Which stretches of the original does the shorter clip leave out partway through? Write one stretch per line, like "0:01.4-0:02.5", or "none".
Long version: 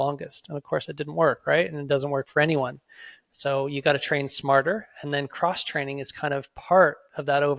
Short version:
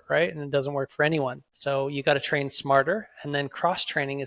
0:02.8-0:03.3